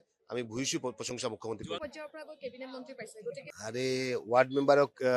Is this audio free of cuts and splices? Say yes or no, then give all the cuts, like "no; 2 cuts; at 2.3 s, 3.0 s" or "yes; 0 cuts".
no; 1 cut; at 3.5 s